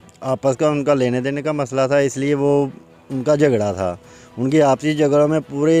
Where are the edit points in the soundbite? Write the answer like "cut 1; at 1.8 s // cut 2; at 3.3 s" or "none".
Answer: none